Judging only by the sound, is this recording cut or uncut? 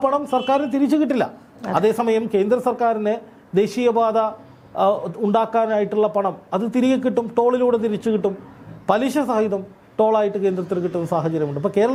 uncut